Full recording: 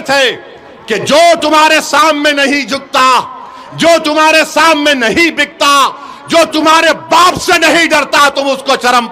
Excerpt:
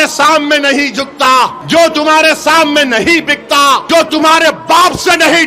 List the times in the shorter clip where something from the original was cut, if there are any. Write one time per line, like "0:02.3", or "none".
0:01.6
0:03.8